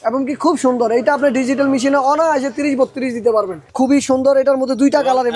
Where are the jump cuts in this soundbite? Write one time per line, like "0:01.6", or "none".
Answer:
0:03.7